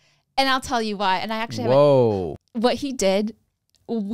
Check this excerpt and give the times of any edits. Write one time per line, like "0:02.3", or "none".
0:02.3